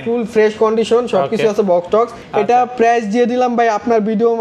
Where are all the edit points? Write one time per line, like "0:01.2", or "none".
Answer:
0:02.2